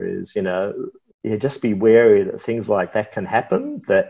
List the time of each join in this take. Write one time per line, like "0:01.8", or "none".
none